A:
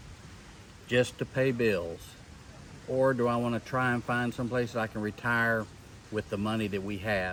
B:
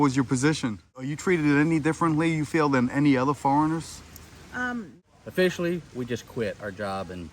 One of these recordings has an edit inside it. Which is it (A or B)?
B